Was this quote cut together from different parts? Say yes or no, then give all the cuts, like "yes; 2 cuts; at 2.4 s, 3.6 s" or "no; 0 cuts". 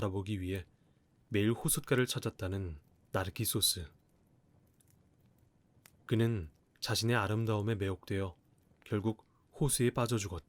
yes; 2 cuts; at 4.5 s, 6.1 s